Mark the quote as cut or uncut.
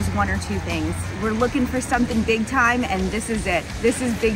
cut